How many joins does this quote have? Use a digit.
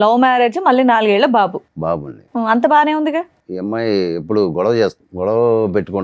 2